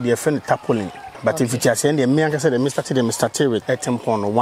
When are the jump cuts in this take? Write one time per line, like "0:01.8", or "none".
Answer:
0:01.1
0:03.6